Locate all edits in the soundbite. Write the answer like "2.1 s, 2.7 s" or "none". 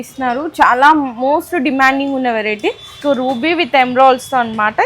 3.0 s